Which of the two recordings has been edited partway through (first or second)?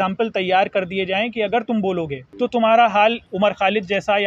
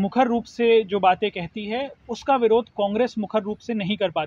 first